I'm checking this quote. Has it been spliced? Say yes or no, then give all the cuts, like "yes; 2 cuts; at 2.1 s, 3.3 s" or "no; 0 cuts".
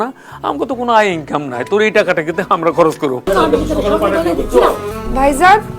yes; 2 cuts; at 3.2 s, 4.9 s